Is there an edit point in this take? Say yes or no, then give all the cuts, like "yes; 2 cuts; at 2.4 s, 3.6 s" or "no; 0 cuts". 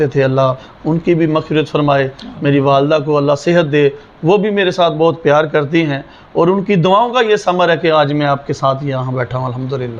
no; 0 cuts